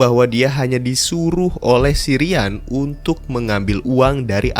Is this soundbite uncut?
yes; 0 cuts

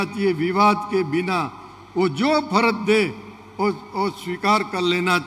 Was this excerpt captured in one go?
yes; 0 cuts

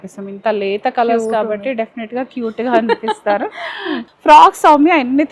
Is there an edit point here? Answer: yes; 1 cut; at 4.0 s

